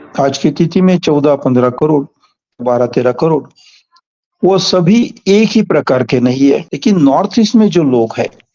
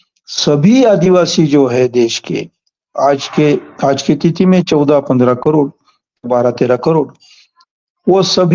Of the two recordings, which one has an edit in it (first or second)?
first